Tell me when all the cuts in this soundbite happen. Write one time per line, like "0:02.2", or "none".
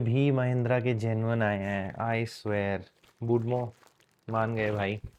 none